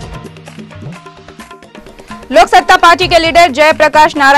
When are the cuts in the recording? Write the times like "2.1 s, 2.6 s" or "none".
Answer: 1.3 s